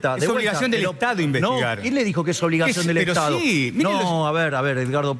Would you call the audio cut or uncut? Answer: uncut